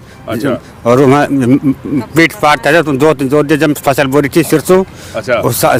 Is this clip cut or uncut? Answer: uncut